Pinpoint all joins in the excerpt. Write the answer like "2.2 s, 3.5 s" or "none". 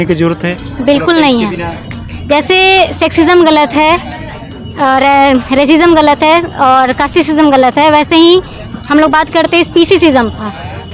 none